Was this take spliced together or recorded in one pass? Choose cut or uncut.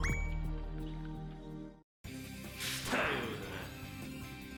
uncut